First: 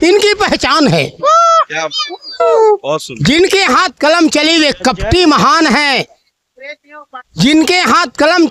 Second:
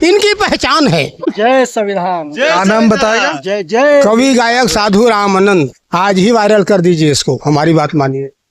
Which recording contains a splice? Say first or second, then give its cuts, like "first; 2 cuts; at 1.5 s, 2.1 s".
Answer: second; 1 cut; at 1.3 s